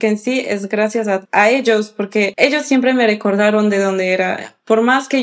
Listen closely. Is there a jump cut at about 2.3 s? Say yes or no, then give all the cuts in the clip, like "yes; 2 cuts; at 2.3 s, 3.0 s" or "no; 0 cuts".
yes; 2 cuts; at 1.3 s, 2.3 s